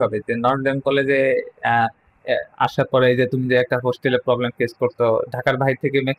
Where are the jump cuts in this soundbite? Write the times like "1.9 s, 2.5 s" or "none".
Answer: none

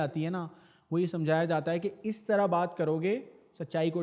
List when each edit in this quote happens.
none

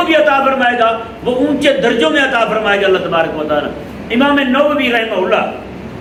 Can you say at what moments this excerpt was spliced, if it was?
none

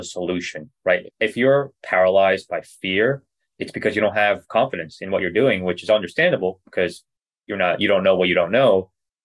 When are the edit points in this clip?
none

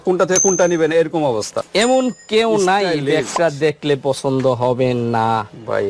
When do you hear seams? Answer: 1.5 s

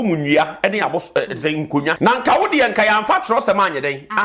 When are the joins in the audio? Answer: 2.0 s

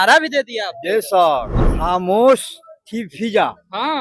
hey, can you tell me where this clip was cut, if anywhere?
1.6 s

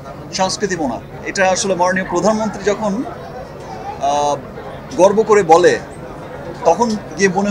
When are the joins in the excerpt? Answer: 1.2 s

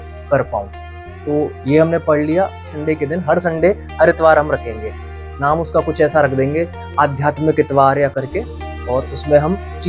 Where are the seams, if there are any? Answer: 2.6 s

